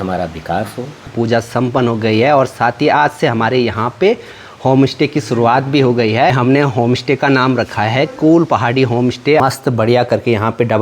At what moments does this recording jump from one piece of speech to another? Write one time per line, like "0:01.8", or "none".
0:01.1
0:09.4

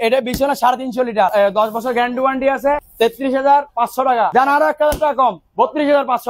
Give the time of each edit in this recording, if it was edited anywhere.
0:01.3
0:02.9
0:04.3

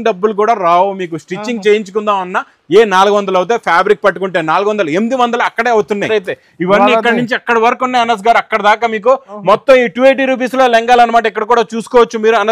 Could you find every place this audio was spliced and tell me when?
0:06.1

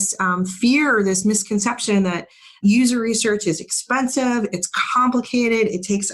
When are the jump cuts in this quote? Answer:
none

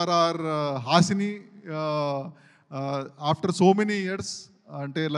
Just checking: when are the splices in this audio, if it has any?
none

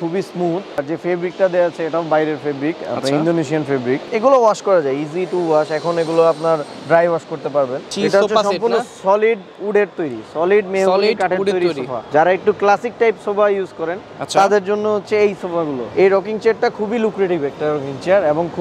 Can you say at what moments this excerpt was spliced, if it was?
0:00.8
0:04.1
0:07.9
0:12.0
0:15.8

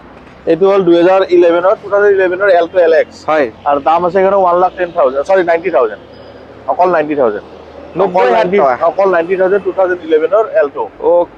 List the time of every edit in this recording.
none

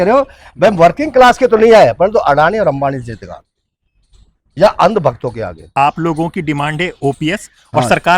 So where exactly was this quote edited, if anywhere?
0:05.6

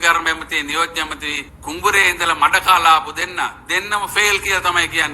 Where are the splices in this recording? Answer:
0:01.5

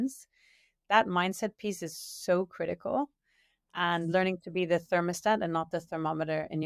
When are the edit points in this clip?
none

